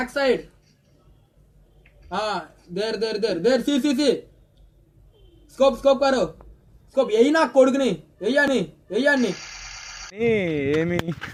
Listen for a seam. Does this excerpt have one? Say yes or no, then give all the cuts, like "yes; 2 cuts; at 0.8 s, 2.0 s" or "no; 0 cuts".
no; 0 cuts